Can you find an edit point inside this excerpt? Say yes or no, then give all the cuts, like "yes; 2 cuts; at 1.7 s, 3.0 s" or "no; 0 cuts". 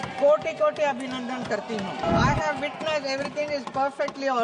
yes; 1 cut; at 2.0 s